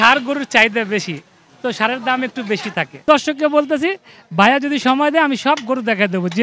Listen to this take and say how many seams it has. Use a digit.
1